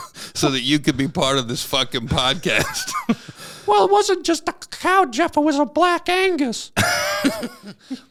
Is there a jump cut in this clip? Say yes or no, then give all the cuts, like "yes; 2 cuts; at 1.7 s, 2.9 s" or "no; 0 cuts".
no; 0 cuts